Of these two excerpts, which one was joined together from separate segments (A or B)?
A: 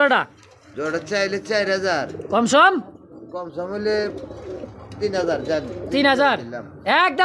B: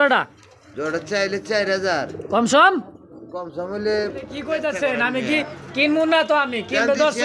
B